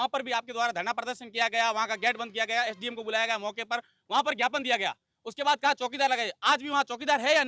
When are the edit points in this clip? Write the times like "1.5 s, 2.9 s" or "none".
none